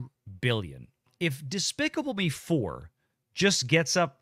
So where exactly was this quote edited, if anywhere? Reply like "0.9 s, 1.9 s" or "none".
1.1 s